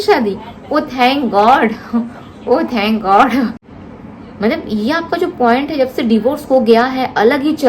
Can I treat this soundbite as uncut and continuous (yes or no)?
no